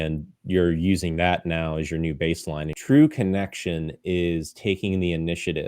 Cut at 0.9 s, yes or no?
no